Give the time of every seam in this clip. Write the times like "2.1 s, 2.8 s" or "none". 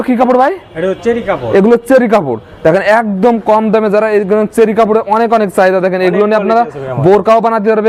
none